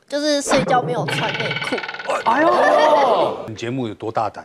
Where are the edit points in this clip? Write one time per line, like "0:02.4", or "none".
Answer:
0:03.5